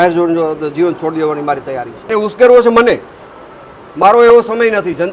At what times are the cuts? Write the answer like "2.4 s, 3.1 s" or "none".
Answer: 1.9 s